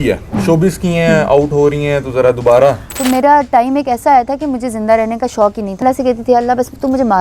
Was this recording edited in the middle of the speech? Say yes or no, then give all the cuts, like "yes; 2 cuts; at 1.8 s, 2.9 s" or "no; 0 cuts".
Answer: yes; 2 cuts; at 2.9 s, 5.8 s